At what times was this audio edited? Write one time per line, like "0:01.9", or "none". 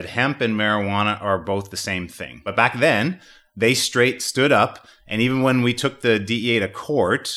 0:02.5